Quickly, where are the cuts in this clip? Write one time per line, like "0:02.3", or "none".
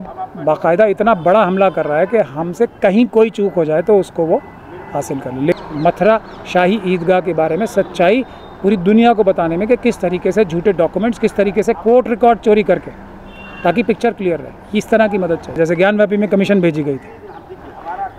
0:05.6
0:15.6